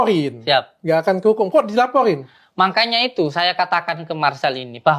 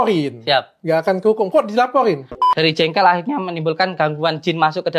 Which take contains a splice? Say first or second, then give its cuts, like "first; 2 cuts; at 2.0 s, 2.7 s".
second; 1 cut; at 2.4 s